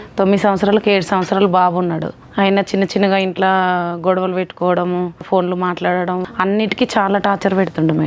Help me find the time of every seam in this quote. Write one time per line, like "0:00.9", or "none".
0:02.2
0:05.3
0:06.3